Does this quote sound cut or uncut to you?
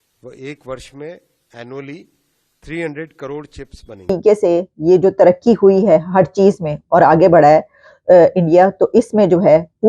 cut